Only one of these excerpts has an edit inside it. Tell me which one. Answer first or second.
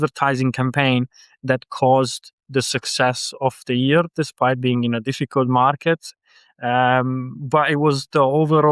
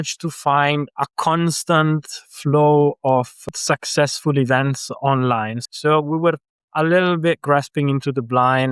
second